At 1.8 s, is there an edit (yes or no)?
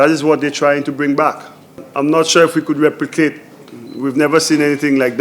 yes